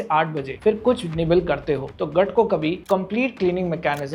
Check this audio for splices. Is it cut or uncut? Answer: uncut